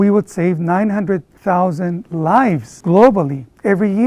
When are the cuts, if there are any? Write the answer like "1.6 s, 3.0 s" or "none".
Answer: 1.3 s